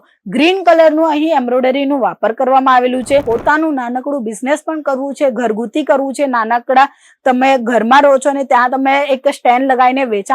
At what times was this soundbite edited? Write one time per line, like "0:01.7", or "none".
0:03.2